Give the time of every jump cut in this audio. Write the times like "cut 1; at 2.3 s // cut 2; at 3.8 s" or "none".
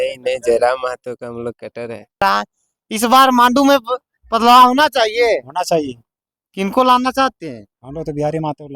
cut 1; at 2.2 s